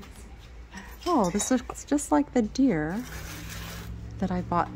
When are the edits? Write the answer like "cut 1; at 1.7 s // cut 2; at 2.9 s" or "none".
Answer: none